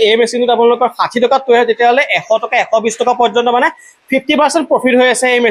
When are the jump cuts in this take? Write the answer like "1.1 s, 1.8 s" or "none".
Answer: none